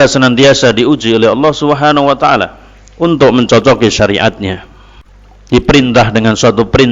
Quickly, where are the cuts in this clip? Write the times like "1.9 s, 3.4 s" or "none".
5.6 s